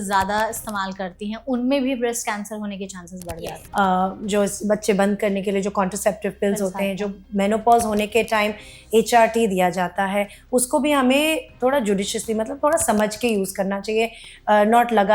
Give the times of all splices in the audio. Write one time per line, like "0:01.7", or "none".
0:03.3